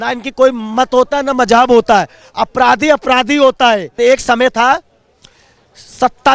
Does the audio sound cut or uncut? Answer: cut